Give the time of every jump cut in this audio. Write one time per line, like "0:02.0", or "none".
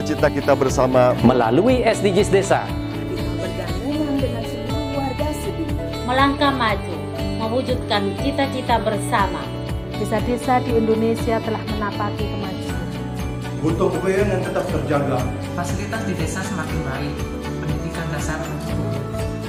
none